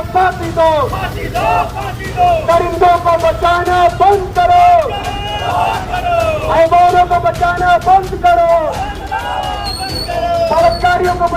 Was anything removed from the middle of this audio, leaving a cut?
no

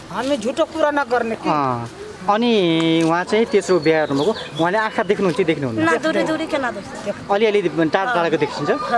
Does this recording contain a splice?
no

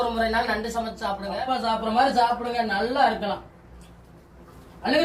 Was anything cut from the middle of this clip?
yes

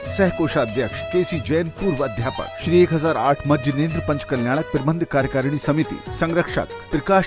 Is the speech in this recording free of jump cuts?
no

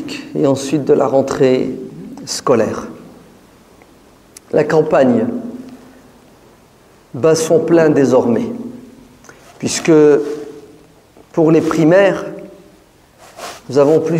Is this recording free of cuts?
yes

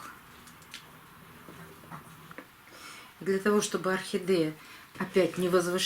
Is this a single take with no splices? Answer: no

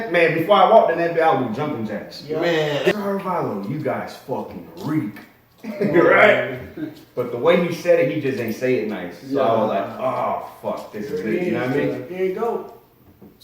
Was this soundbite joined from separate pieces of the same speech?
yes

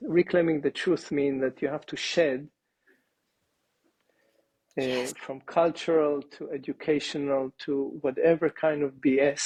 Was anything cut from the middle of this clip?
no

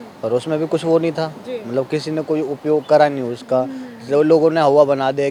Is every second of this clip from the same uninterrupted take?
yes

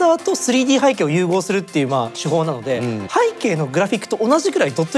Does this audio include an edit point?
no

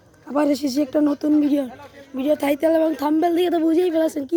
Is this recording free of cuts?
yes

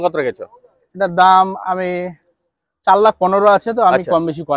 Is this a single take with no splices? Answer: yes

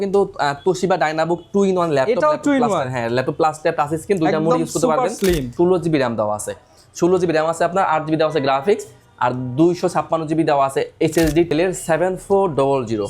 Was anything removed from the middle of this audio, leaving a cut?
yes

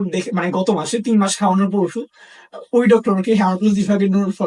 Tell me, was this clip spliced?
no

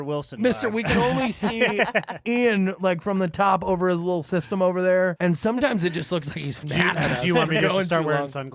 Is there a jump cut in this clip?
yes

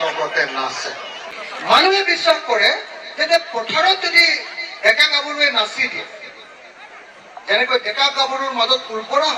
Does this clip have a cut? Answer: yes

